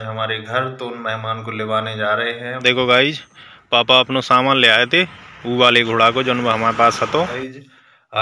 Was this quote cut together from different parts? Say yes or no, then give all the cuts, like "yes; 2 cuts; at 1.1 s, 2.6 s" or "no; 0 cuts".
yes; 2 cuts; at 2.4 s, 7.3 s